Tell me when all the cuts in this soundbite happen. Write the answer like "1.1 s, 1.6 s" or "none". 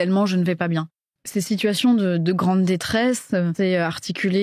1.0 s, 3.5 s